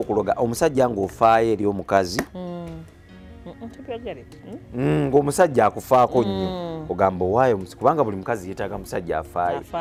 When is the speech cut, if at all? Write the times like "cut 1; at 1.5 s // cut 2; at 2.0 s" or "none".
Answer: none